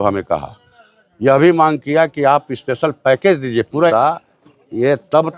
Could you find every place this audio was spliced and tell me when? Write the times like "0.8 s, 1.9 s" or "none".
3.9 s

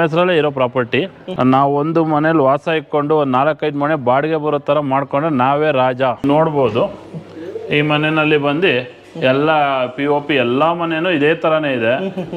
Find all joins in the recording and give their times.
1.2 s, 6.2 s

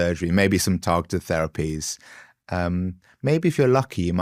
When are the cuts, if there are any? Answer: none

